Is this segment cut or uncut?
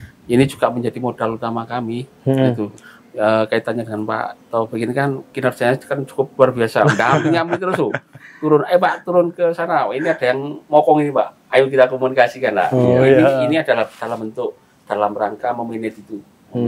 uncut